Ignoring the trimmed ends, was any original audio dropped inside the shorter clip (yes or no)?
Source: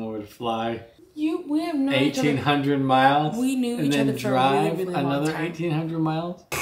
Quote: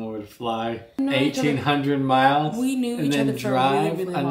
yes